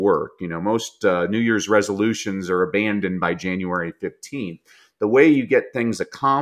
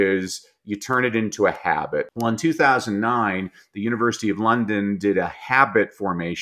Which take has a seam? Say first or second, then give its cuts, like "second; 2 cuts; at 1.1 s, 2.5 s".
second; 1 cut; at 2.1 s